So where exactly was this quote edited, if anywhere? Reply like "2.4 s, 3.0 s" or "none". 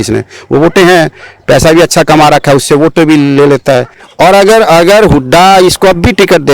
4.0 s